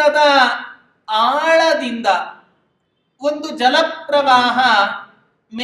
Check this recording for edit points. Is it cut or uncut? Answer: uncut